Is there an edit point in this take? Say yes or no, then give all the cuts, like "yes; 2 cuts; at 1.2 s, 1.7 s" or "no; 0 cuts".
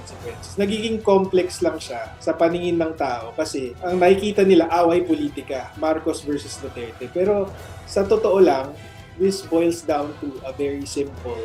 no; 0 cuts